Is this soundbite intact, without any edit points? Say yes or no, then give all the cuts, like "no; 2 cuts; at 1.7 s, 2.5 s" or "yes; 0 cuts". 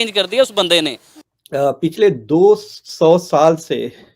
no; 1 cut; at 1.1 s